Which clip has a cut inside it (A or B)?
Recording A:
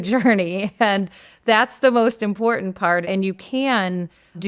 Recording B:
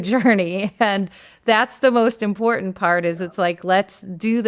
A